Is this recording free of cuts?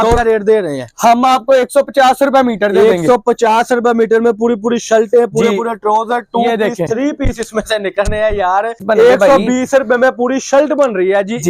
no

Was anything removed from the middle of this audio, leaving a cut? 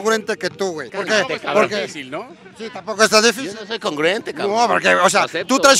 no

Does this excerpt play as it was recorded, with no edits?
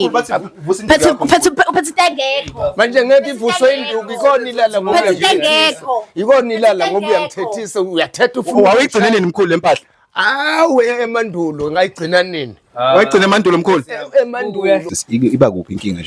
no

